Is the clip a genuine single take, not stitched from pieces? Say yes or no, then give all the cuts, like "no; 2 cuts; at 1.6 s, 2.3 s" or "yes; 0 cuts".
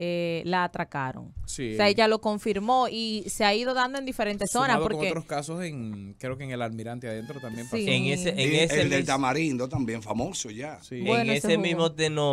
yes; 0 cuts